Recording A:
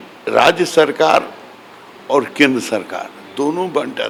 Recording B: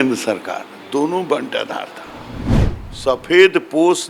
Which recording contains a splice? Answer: B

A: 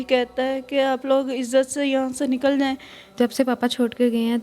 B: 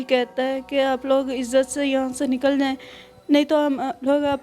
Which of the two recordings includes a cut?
A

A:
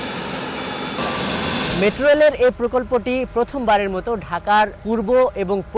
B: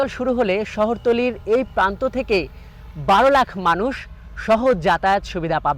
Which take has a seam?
A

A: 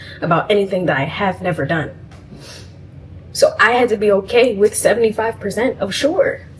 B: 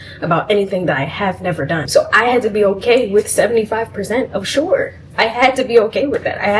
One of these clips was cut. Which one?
B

